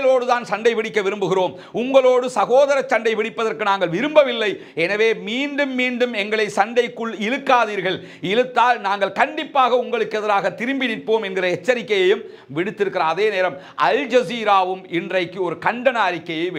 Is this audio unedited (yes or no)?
yes